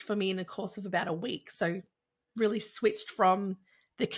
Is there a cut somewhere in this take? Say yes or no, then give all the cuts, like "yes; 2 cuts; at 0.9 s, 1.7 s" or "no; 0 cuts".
no; 0 cuts